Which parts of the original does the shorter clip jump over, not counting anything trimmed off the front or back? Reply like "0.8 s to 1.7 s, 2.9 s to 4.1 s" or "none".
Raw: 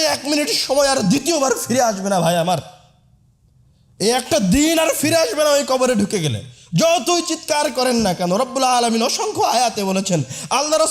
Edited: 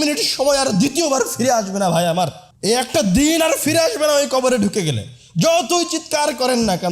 2.8 s to 3.8 s